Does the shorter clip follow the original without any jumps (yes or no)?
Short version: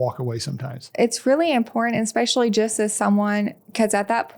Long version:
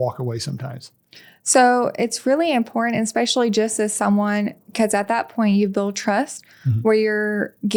no